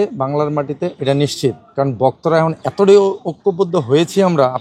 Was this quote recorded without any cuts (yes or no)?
yes